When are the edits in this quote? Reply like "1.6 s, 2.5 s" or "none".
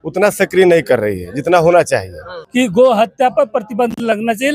2.4 s